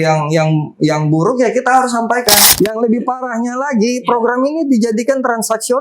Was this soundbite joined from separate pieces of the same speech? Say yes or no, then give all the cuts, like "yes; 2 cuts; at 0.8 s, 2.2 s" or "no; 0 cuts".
yes; 1 cut; at 2.5 s